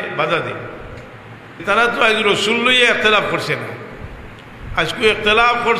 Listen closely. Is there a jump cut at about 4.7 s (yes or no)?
no